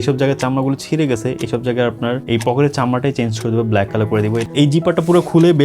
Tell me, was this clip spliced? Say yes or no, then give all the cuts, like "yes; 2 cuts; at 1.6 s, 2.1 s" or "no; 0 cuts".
yes; 2 cuts; at 2.2 s, 4.5 s